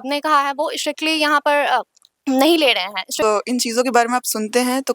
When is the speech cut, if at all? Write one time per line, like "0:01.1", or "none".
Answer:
0:03.2